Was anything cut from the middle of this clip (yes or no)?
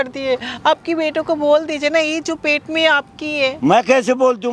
no